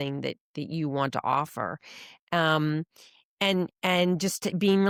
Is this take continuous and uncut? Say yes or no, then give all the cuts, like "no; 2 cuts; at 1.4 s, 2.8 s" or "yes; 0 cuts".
yes; 0 cuts